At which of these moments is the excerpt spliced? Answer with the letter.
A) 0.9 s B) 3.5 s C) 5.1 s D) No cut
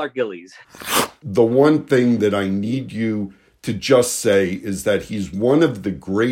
A